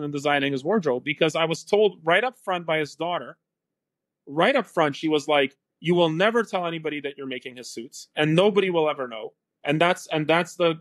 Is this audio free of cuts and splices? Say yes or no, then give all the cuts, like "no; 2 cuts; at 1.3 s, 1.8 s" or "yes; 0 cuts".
yes; 0 cuts